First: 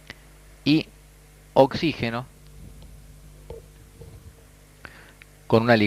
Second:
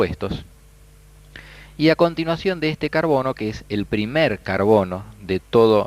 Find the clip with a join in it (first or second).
first